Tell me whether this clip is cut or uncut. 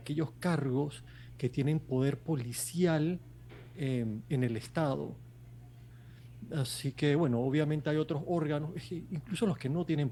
uncut